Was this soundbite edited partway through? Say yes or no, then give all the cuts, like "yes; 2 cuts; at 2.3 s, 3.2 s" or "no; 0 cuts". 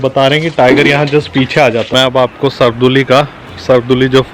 yes; 1 cut; at 1.9 s